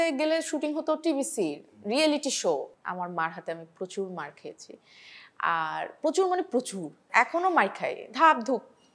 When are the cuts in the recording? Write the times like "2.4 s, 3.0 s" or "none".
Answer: 2.7 s, 7.1 s

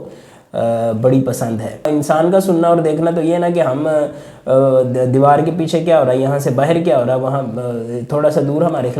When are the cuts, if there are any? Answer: 1.9 s

